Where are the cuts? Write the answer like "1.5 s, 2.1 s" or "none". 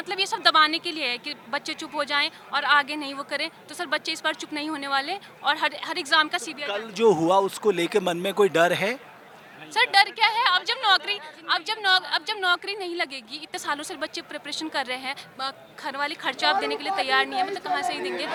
none